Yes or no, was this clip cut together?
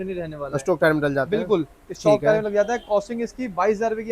no